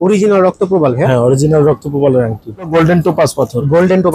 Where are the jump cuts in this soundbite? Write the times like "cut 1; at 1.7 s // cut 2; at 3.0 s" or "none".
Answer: cut 1; at 2.7 s